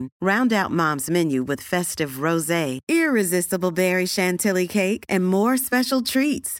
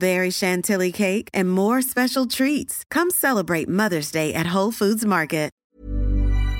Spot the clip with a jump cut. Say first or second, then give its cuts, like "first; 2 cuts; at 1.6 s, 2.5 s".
second; 1 cut; at 5.7 s